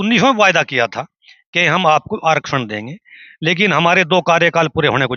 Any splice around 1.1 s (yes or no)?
no